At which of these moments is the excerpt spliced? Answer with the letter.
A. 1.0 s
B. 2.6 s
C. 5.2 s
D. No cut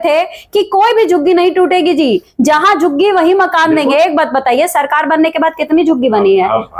D